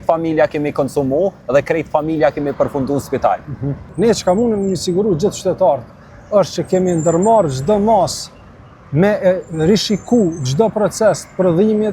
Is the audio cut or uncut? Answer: uncut